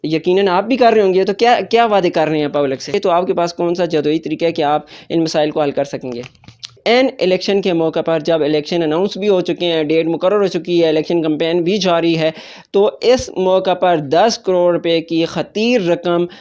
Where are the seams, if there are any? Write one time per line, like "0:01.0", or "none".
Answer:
0:02.9
0:06.8